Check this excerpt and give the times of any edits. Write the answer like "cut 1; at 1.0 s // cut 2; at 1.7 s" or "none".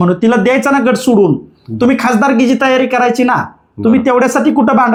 none